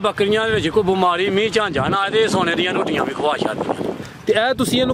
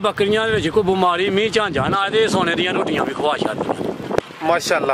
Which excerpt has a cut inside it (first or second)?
first